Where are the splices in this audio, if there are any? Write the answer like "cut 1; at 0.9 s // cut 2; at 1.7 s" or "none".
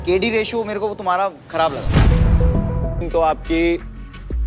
cut 1; at 3.0 s